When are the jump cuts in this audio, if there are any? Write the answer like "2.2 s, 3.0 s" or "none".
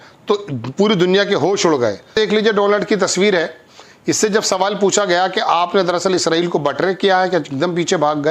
2.1 s